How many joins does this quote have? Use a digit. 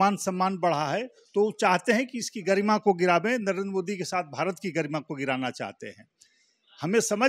0